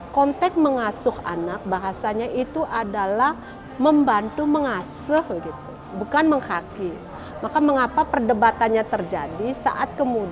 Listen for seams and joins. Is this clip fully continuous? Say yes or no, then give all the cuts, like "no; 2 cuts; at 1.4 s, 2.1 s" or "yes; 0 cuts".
yes; 0 cuts